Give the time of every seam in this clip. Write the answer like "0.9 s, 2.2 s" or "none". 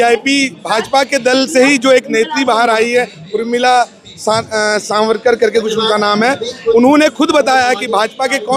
none